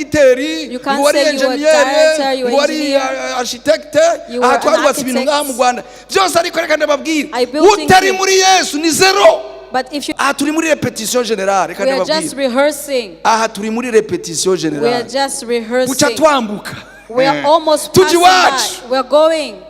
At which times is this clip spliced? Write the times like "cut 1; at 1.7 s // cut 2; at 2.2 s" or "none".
cut 1; at 10.1 s